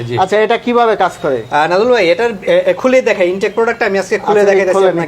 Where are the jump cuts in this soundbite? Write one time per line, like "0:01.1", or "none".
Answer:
none